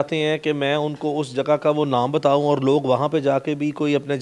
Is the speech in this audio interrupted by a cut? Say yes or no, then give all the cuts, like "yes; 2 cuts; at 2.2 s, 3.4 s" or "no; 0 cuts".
no; 0 cuts